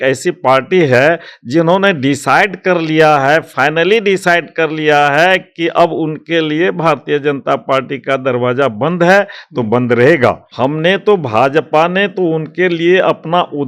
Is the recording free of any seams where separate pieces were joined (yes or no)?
no